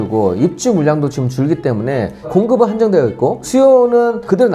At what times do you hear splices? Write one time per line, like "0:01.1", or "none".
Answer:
none